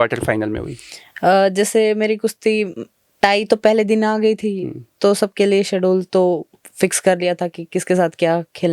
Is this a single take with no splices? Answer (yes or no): yes